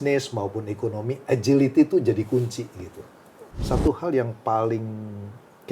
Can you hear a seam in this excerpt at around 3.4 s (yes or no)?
yes